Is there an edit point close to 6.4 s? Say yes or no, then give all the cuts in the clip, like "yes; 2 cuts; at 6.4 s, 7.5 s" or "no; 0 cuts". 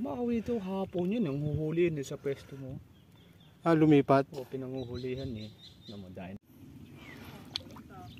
yes; 1 cut; at 6.4 s